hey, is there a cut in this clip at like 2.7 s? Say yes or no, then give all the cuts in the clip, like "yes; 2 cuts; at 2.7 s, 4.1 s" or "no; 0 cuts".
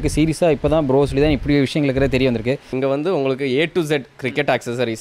yes; 1 cut; at 2.7 s